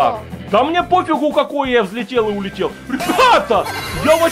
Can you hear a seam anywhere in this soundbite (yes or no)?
no